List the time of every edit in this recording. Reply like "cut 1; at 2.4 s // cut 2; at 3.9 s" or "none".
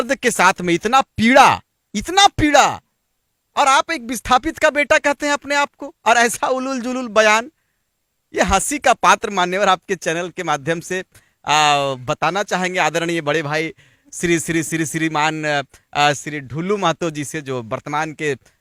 none

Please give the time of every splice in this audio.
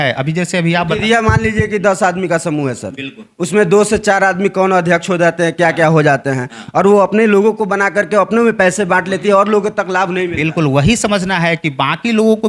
none

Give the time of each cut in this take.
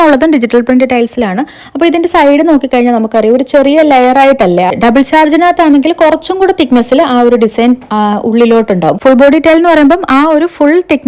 cut 1; at 4.7 s // cut 2; at 9.0 s

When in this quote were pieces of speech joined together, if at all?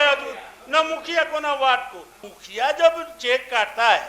cut 1; at 2.3 s

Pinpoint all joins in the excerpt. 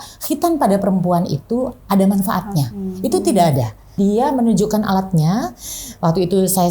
cut 1; at 4.0 s

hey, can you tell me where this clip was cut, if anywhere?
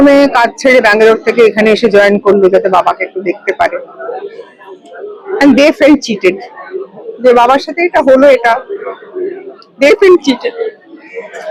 none

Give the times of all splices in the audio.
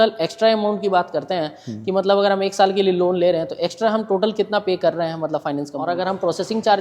cut 1; at 5.8 s

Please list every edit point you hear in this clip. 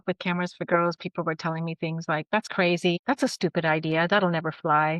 cut 1; at 3.0 s

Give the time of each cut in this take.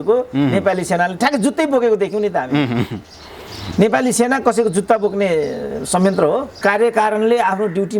cut 1; at 6.6 s

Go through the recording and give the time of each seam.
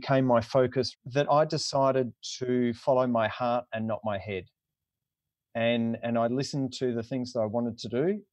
cut 1; at 0.9 s

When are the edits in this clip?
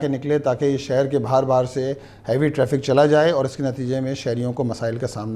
none

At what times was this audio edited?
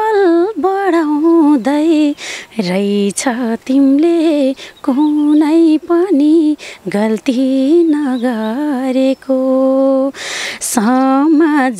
none

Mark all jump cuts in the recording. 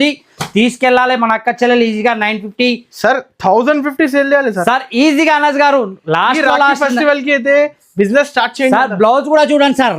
none

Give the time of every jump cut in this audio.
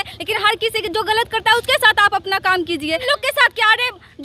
cut 1; at 3.0 s

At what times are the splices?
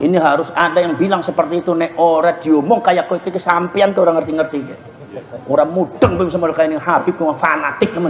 none

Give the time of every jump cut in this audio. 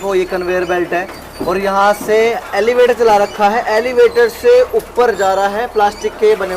cut 1; at 2.2 s

